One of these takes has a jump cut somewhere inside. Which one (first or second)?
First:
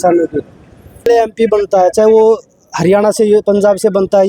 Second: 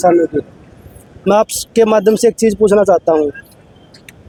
first